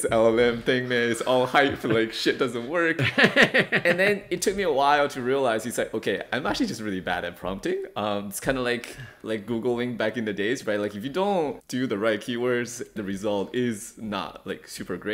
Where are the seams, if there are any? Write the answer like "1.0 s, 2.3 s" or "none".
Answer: 11.6 s, 13.0 s